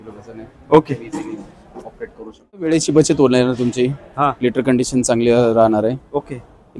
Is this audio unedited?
no; 1 cut; at 2.6 s

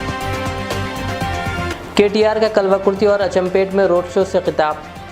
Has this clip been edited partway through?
yes; 1 cut; at 1.7 s

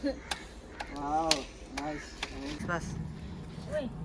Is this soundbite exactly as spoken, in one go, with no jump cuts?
no; 1 cut; at 2.6 s

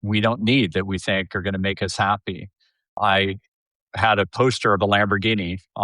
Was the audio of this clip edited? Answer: yes; 1 cut; at 2.9 s

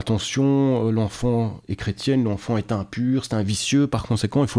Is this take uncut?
yes; 0 cuts

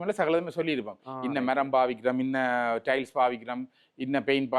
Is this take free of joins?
yes; 0 cuts

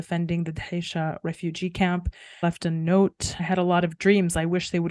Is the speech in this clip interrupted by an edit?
yes; 2 cuts; at 2.4 s, 3.3 s

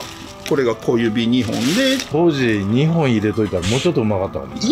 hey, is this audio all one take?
no; 1 cut; at 2.0 s

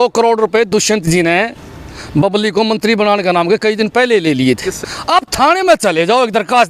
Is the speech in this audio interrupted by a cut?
yes; 1 cut; at 4.9 s

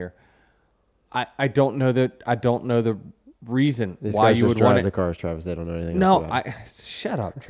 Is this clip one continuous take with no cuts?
yes; 0 cuts

